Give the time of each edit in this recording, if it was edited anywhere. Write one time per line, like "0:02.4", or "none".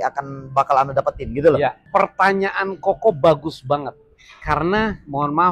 none

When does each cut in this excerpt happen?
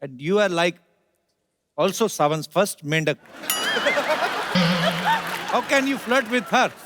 none

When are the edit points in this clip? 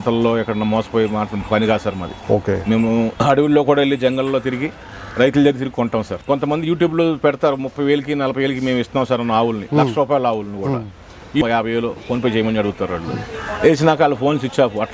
0:06.2
0:11.4

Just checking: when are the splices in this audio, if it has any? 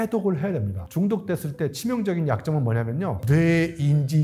0:00.8
0:03.2

